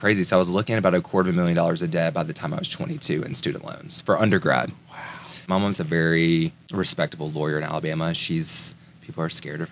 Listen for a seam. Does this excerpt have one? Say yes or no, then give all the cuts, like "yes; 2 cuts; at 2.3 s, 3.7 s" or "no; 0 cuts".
yes; 2 cuts; at 5.5 s, 6.6 s